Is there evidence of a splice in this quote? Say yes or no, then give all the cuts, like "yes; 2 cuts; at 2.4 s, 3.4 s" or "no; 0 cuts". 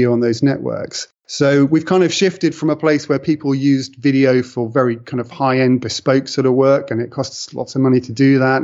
no; 0 cuts